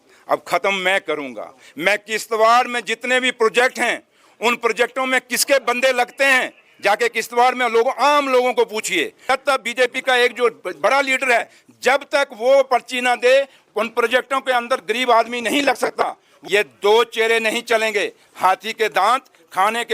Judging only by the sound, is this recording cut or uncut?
cut